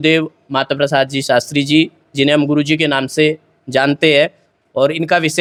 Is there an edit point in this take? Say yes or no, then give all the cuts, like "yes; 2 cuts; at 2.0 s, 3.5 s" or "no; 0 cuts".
no; 0 cuts